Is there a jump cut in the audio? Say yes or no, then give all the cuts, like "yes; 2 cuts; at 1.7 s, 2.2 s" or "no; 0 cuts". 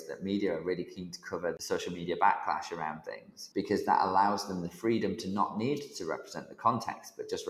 yes; 2 cuts; at 1.6 s, 3.4 s